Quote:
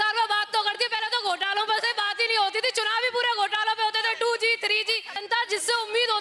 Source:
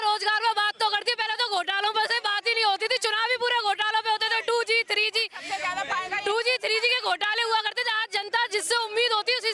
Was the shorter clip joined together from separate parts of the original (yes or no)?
yes